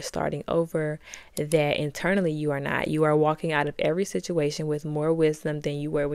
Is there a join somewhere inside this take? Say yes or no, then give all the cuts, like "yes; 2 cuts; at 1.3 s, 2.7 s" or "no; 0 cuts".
no; 0 cuts